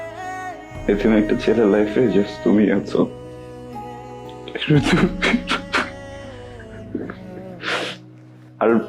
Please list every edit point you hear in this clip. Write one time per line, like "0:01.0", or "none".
0:06.9